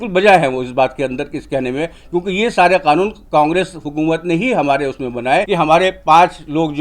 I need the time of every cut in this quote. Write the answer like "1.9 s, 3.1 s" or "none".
5.5 s

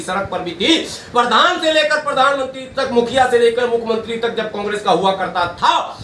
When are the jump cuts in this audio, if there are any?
none

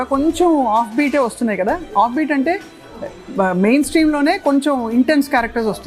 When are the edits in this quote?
none

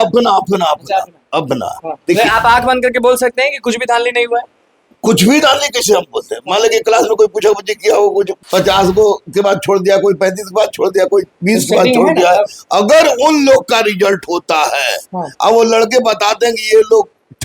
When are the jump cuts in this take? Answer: 1.9 s, 8.4 s

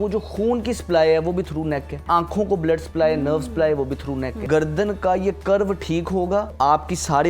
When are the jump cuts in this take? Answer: 2.0 s, 4.4 s, 6.5 s

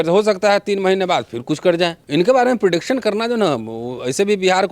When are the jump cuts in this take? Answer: 2.0 s

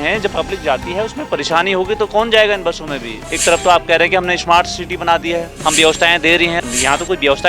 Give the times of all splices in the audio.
3.2 s, 5.5 s, 6.6 s

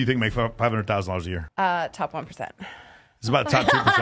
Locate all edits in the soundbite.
1.4 s

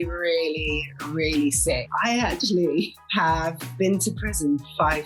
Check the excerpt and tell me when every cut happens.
none

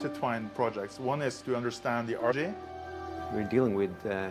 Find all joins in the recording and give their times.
2.4 s

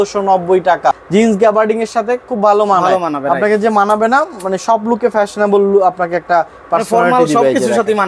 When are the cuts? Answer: 0.9 s

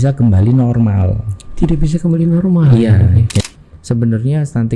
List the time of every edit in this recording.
3.4 s

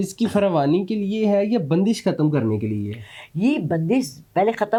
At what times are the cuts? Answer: none

